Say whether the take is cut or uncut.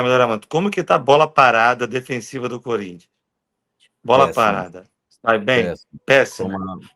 uncut